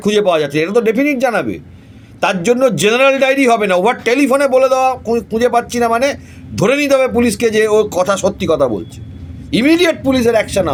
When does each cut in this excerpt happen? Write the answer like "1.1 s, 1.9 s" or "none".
none